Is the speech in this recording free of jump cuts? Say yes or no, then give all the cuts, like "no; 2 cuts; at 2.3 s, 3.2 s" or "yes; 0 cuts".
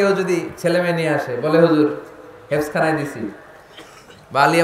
yes; 0 cuts